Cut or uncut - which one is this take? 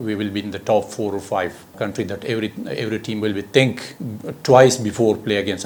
uncut